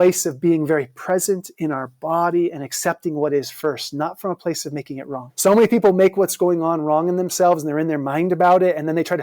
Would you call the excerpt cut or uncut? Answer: cut